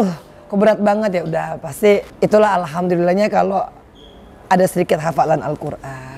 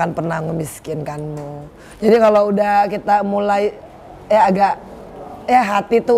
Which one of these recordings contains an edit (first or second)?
first